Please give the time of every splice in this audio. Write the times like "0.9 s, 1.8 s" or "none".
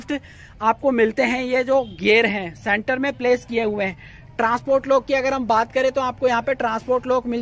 none